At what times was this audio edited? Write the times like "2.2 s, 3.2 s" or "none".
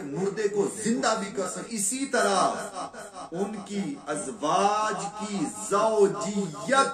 1.7 s